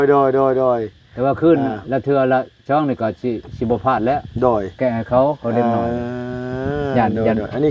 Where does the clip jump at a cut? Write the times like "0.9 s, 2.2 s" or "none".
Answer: none